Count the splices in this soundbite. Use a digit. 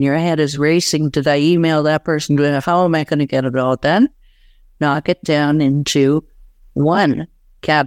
0